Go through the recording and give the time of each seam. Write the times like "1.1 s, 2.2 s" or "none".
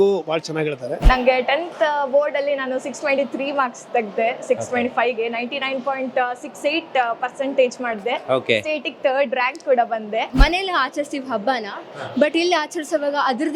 1.0 s, 10.3 s